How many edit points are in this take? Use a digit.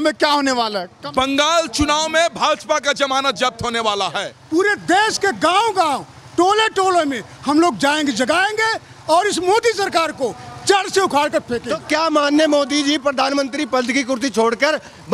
3